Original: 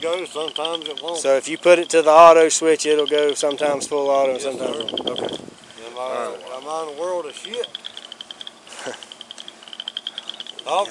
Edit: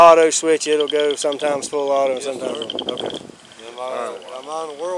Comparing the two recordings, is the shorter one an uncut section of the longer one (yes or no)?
yes